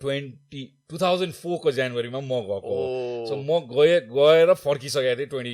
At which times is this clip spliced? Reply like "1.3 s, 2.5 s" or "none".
none